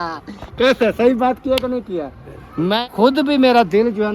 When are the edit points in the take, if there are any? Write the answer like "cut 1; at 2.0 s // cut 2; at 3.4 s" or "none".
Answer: cut 1; at 2.7 s